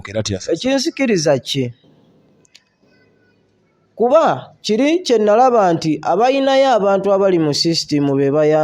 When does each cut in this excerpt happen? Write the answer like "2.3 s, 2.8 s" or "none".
none